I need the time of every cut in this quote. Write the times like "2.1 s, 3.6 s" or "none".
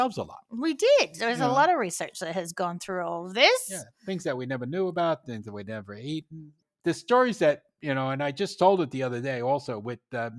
6.6 s